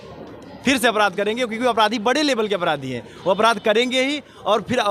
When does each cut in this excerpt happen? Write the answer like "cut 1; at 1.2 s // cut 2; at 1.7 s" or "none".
none